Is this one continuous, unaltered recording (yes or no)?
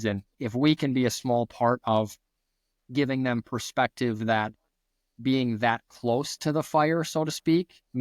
yes